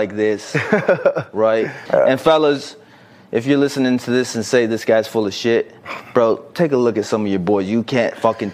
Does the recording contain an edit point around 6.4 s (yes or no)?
no